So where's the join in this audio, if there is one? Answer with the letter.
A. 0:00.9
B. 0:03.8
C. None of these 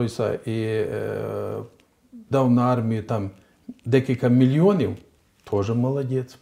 C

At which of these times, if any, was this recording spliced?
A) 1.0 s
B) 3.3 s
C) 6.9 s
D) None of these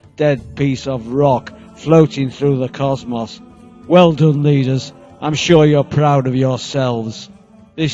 D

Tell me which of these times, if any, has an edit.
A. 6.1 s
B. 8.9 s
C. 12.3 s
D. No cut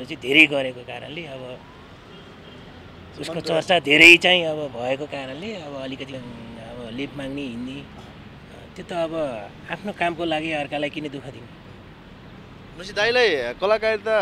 A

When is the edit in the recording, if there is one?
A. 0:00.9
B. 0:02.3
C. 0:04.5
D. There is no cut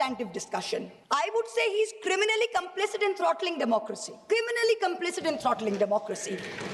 A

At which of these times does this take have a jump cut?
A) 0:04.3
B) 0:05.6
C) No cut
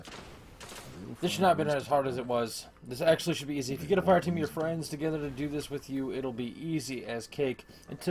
B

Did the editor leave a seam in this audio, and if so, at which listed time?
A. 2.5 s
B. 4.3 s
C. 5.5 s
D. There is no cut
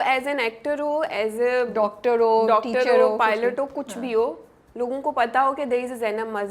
D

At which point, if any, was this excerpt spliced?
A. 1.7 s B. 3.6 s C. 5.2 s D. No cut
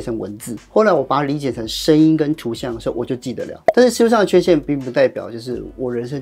B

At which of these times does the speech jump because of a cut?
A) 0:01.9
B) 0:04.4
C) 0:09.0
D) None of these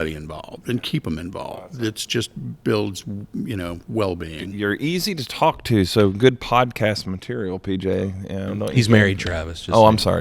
B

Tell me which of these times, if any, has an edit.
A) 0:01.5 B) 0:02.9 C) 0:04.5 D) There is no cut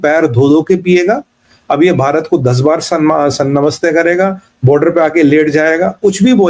D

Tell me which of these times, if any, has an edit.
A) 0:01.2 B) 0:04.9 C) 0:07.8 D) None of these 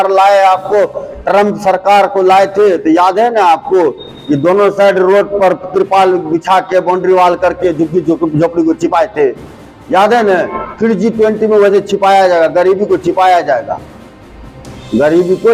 A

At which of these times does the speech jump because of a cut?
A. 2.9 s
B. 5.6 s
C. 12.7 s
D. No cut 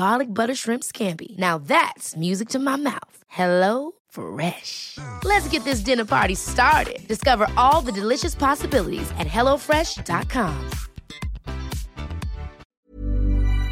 C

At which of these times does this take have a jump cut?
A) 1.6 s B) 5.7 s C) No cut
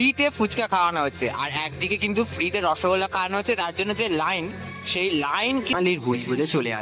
B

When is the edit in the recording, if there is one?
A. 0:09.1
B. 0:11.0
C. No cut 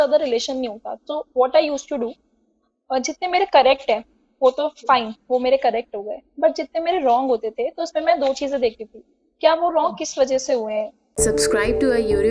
B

